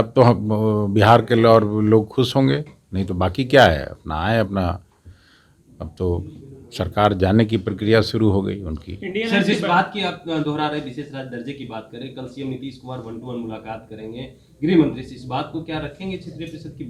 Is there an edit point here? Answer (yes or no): no